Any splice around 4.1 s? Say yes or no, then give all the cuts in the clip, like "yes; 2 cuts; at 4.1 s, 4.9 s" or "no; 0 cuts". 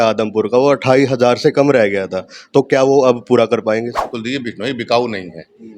yes; 1 cut; at 4.1 s